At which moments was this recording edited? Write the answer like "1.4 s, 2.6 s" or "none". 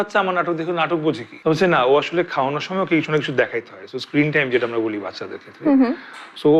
1.3 s